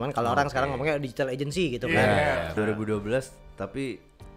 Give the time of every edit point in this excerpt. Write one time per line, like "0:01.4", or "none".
0:02.5